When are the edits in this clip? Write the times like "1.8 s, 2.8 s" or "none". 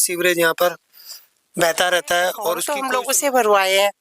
2.7 s

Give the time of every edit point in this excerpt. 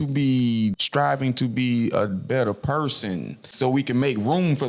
0.8 s, 3.5 s

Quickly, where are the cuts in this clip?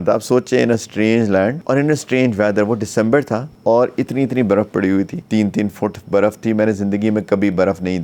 1.6 s, 3.5 s, 5.2 s

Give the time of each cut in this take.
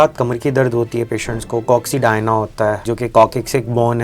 2.9 s

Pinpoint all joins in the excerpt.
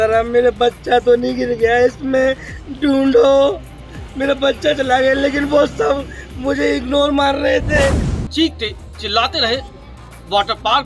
8.1 s

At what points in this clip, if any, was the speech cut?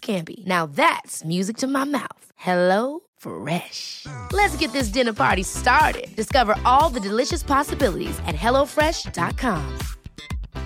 none

